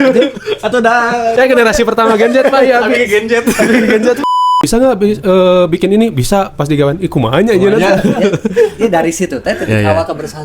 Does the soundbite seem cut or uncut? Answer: cut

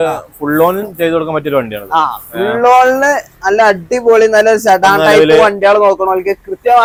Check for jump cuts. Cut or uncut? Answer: uncut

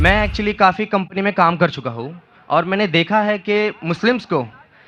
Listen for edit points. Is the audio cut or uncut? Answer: uncut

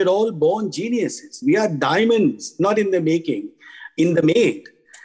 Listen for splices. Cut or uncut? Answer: cut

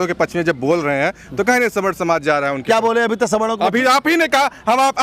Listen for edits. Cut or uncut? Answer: uncut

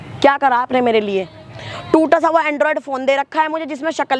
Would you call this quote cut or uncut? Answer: uncut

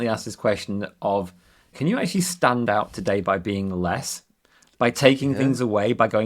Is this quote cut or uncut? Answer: cut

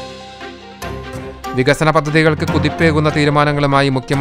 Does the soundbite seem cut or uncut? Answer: cut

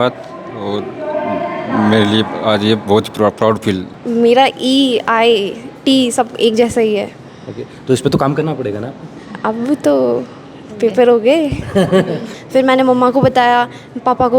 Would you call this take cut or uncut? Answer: cut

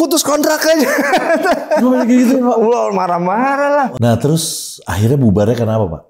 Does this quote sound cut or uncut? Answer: cut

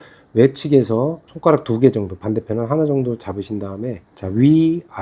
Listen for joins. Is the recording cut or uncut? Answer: cut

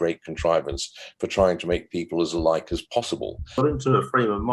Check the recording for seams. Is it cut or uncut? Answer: cut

